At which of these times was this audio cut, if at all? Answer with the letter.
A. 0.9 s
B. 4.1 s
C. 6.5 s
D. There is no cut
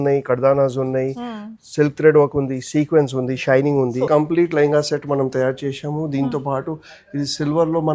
B